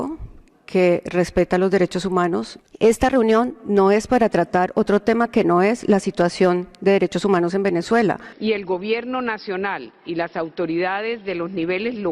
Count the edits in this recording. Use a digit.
2